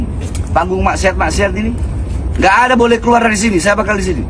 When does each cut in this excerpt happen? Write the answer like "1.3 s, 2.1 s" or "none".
none